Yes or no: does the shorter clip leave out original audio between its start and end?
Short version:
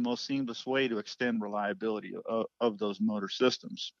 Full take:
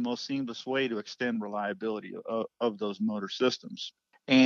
no